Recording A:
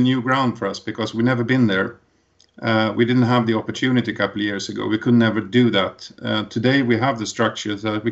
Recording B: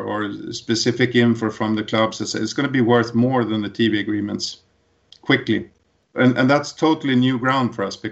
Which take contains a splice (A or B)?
B